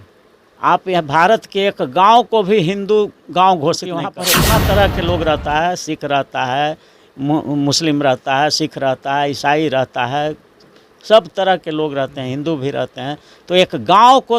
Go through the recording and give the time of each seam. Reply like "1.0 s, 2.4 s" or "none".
4.2 s